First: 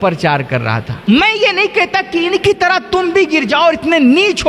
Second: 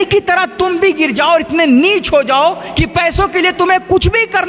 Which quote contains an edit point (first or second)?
first